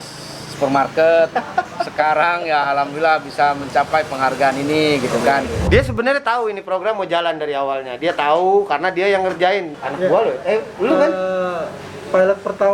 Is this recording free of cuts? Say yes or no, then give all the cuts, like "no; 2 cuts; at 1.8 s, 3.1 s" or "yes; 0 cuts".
no; 1 cut; at 5.7 s